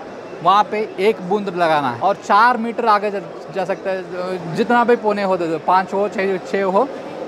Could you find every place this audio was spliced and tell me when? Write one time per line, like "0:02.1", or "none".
0:01.9